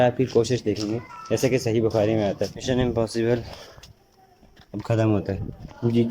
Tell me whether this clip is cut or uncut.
cut